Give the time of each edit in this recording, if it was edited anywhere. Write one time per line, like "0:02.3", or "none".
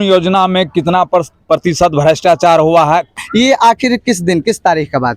0:03.1